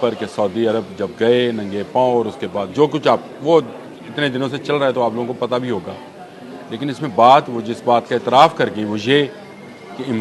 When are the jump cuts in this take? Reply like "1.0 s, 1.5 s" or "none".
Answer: none